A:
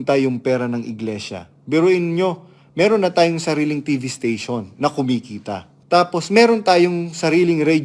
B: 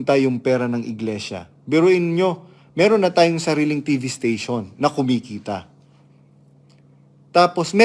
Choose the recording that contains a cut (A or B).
A